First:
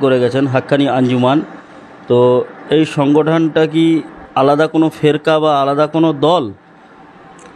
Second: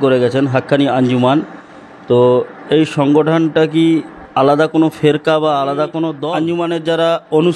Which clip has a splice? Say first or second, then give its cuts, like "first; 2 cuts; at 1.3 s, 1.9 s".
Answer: second; 1 cut; at 6.2 s